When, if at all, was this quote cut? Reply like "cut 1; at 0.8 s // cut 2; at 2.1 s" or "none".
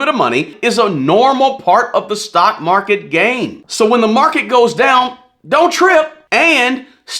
cut 1; at 6.2 s